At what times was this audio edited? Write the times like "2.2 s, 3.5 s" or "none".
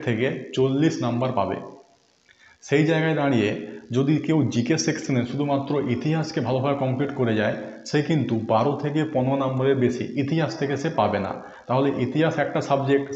none